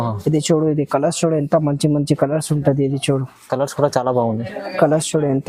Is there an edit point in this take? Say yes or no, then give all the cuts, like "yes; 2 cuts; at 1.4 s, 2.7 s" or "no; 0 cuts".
no; 0 cuts